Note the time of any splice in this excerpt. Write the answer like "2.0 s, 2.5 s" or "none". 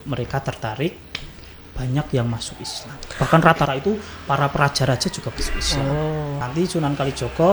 6.4 s